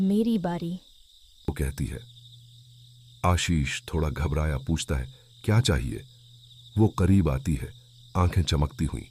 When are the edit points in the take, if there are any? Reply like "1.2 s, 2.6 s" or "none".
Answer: none